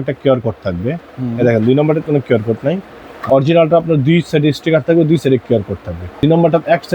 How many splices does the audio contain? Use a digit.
2